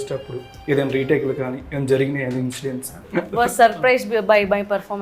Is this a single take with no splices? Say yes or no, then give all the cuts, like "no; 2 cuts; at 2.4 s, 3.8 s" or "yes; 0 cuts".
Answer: no; 1 cut; at 3.0 s